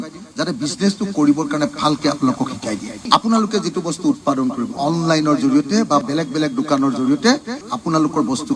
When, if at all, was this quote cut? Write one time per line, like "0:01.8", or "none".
0:04.7
0:07.6

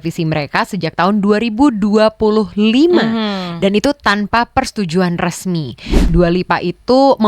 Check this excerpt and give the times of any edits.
0:06.1

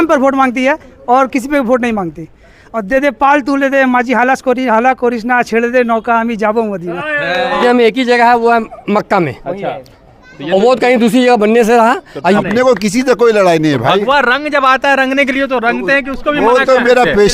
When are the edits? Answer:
0:07.6
0:12.4

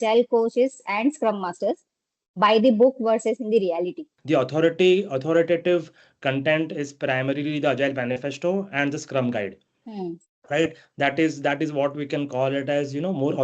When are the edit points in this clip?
0:04.1

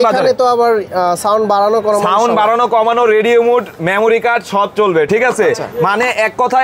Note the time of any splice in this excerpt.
none

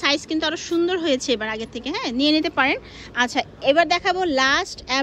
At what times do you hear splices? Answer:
none

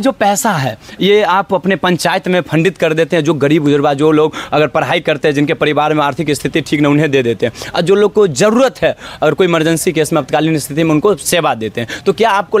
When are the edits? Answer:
none

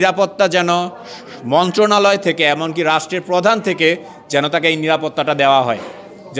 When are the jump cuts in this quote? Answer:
none

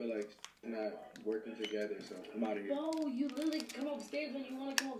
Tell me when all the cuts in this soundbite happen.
0:02.2

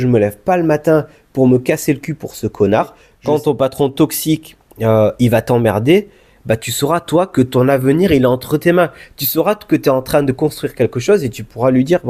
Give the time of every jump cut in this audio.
0:03.1

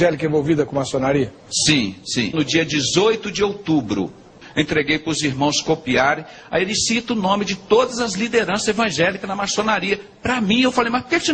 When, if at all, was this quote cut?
0:04.4

